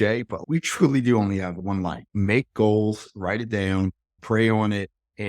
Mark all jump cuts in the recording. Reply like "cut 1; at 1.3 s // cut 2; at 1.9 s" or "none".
cut 1; at 2.0 s